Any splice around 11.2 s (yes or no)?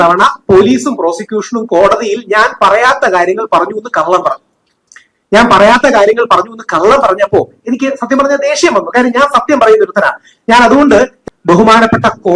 yes